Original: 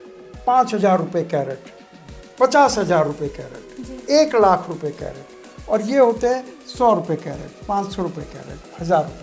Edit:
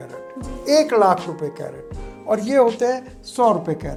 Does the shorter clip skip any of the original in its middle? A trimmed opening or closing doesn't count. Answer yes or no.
no